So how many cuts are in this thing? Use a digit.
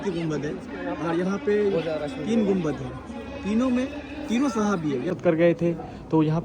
1